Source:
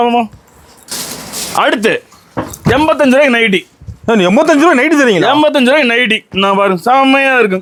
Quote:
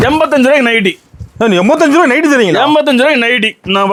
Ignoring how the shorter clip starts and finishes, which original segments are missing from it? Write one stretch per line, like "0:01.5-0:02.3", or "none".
none

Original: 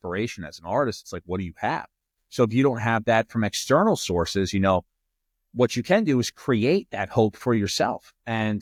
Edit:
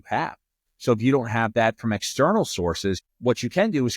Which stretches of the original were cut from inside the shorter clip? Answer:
0:04.5-0:05.3

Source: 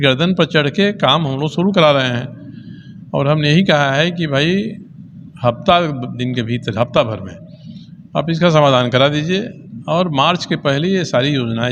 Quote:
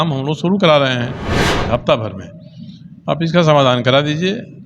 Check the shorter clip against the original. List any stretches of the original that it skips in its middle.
0:02.7-0:06.6

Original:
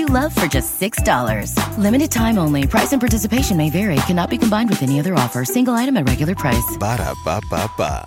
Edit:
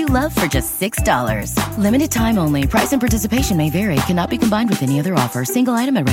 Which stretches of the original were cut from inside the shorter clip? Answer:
none

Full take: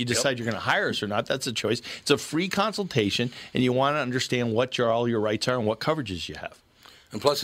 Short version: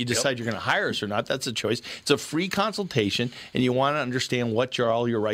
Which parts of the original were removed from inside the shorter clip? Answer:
none

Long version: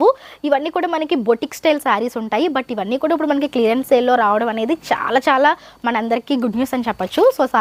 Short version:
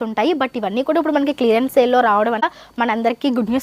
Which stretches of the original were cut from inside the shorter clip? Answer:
0:04.6-0:05.5

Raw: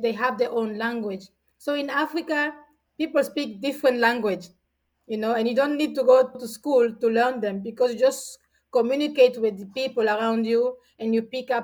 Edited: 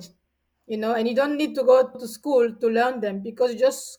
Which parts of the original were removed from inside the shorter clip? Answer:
none

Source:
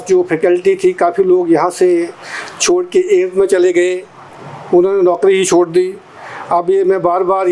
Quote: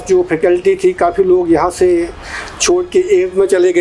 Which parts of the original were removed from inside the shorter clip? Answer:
none

